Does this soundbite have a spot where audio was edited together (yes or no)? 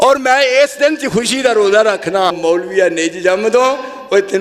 yes